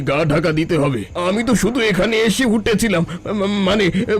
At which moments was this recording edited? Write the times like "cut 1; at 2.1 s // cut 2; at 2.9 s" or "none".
cut 1; at 1.1 s

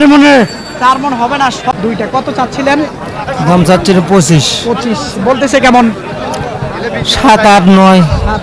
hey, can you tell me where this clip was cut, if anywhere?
cut 1; at 1.7 s

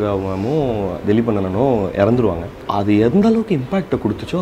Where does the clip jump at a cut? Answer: cut 1; at 2.6 s

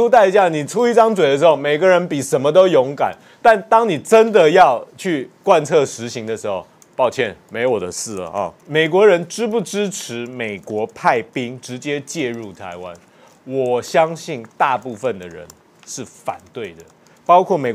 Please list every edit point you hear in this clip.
cut 1; at 8.6 s

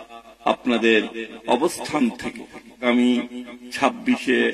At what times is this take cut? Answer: cut 1; at 2.8 s

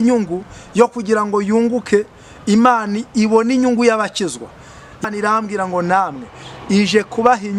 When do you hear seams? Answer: cut 1; at 5.0 s

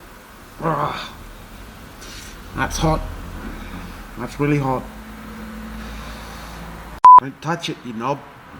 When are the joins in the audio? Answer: cut 1; at 7.2 s

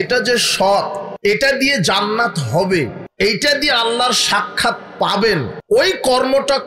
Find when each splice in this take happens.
cut 1; at 1.0 s // cut 2; at 3.0 s // cut 3; at 5.5 s

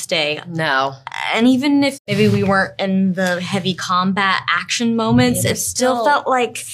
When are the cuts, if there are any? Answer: cut 1; at 2.0 s

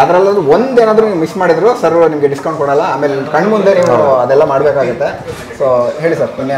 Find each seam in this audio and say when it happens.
none

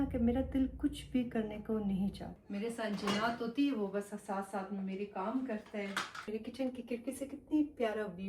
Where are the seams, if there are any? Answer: cut 1; at 2.3 s // cut 2; at 6.3 s

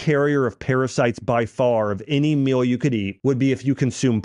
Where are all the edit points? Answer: cut 1; at 3.1 s

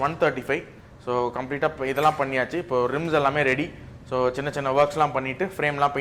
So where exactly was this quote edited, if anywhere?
none

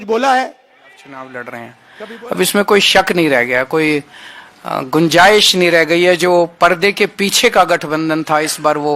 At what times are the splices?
cut 1; at 1.0 s

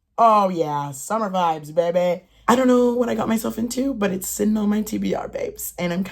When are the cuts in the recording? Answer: cut 1; at 2.3 s

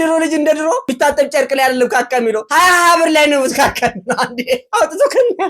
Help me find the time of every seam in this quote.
cut 1; at 0.9 s // cut 2; at 4.7 s

